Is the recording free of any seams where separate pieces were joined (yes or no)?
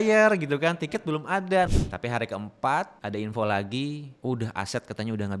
no